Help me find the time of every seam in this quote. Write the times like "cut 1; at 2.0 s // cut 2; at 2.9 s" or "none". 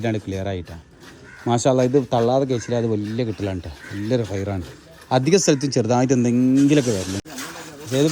cut 1; at 7.2 s

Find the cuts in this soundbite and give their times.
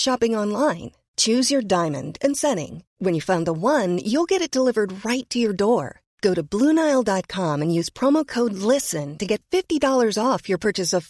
none

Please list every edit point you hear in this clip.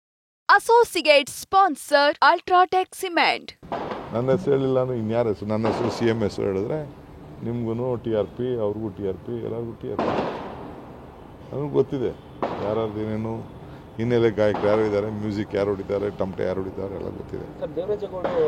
cut 1; at 3.5 s

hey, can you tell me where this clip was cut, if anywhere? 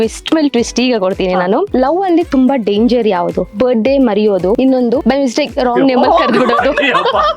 cut 1; at 1.7 s // cut 2; at 3.4 s // cut 3; at 4.8 s

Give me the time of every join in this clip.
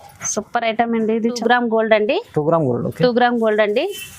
cut 1; at 1.4 s

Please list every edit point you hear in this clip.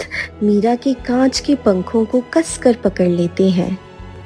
none

